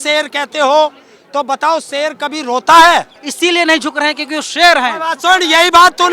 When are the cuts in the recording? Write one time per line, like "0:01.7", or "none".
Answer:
0:03.2